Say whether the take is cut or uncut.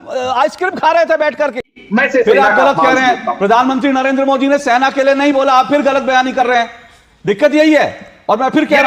cut